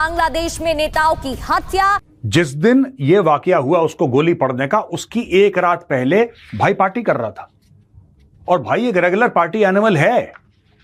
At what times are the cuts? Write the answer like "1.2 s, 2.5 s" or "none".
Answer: none